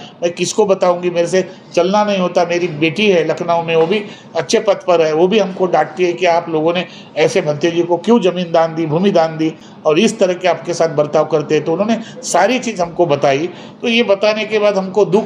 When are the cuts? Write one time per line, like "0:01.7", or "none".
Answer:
none